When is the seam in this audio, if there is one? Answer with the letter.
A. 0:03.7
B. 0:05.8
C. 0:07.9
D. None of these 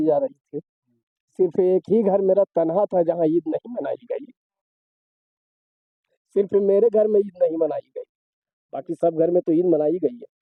D